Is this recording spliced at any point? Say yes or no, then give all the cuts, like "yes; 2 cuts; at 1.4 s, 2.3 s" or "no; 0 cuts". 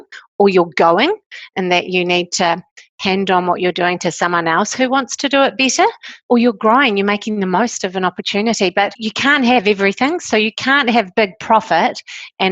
yes; 2 cuts; at 6.1 s, 9.0 s